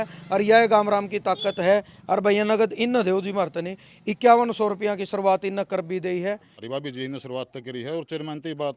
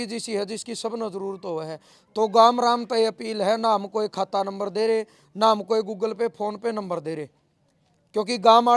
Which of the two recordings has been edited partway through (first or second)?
first